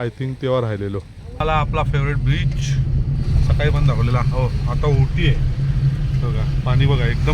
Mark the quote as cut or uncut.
cut